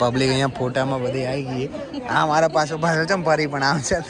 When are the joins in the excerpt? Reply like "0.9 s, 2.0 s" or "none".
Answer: none